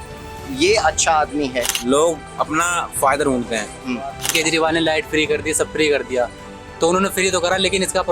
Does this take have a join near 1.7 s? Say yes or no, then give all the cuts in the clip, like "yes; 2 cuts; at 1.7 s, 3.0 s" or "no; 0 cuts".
yes; 2 cuts; at 1.7 s, 4.3 s